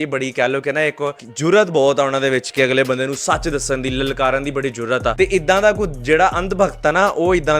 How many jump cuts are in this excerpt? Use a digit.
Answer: 2